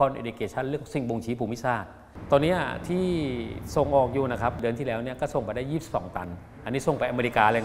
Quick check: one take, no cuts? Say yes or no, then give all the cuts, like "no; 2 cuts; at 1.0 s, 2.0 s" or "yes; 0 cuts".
no; 2 cuts; at 2.1 s, 4.6 s